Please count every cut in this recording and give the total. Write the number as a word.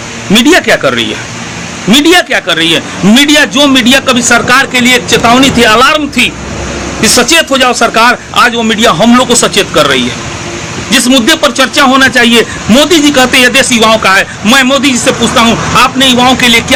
zero